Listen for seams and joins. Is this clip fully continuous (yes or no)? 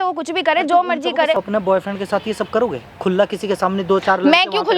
no